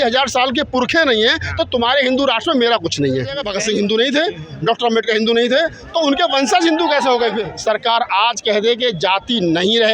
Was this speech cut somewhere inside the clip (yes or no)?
yes